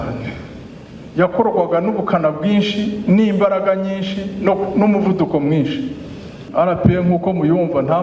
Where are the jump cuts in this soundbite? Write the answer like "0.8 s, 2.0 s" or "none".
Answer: 6.4 s